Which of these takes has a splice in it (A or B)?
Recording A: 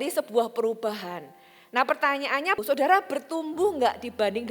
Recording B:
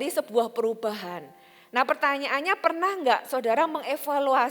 A